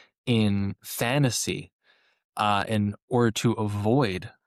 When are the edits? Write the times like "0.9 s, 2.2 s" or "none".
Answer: none